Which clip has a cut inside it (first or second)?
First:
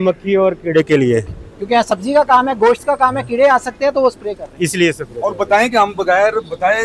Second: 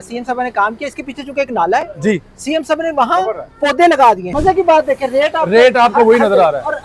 second